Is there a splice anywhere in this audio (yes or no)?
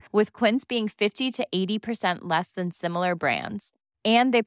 no